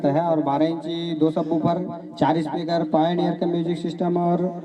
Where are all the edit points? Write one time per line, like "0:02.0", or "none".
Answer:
none